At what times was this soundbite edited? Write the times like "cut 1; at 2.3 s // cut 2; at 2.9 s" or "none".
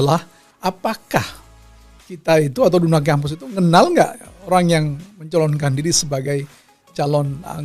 none